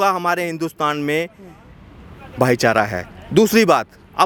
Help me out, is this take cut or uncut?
uncut